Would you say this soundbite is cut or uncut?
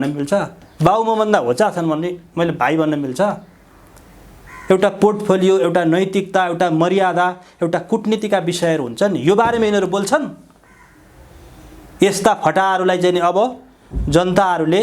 uncut